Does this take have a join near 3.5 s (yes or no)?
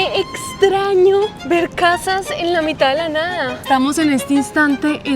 yes